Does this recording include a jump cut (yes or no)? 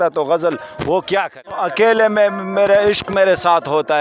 yes